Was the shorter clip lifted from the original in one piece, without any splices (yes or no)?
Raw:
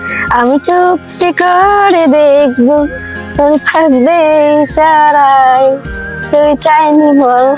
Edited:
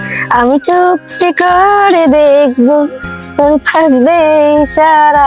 yes